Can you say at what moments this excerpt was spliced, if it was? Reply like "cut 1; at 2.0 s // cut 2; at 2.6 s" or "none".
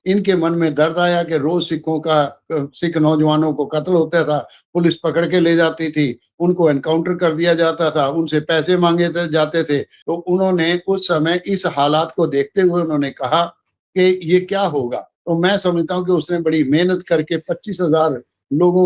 cut 1; at 10.0 s // cut 2; at 15.1 s